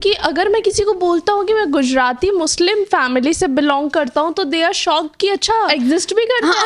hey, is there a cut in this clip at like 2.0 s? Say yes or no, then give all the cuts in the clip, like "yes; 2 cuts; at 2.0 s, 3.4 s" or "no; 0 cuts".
no; 1 cut; at 5.7 s